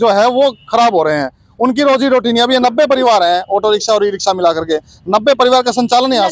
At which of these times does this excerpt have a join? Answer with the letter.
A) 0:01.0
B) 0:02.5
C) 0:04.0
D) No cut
D